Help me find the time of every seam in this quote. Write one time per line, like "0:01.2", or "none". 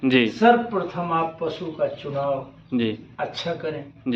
none